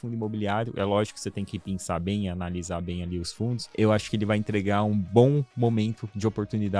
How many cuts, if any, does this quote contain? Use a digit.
1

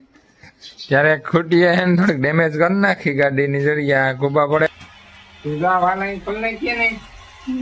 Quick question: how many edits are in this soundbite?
1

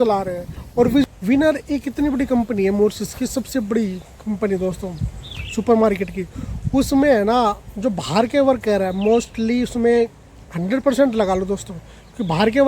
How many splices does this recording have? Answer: 1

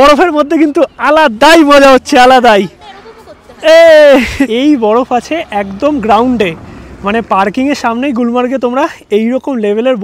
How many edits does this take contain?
1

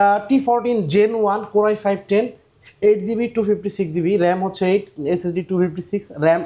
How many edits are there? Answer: 0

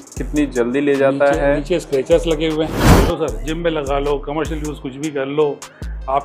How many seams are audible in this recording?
1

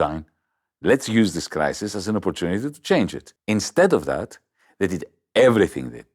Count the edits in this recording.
1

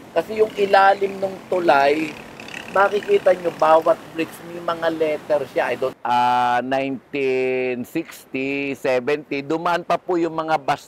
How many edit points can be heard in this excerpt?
1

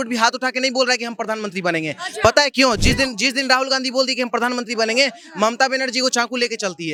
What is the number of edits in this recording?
0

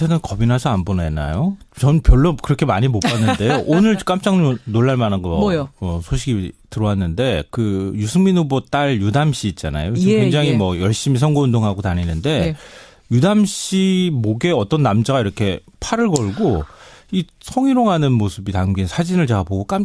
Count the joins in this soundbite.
0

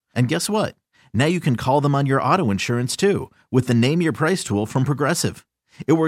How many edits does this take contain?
0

